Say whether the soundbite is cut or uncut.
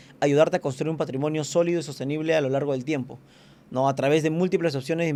uncut